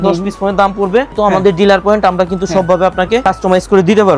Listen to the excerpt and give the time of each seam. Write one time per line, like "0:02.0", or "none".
0:01.2
0:03.2